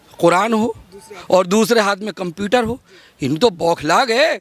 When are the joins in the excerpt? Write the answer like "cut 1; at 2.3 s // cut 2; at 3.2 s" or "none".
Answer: none